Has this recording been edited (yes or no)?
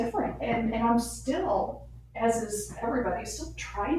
no